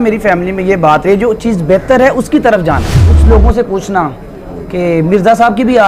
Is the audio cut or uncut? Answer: cut